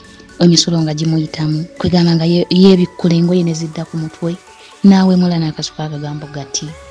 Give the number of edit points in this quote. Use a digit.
0